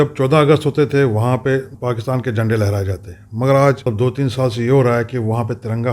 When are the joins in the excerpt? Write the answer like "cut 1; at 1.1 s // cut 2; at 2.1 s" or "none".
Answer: cut 1; at 3.8 s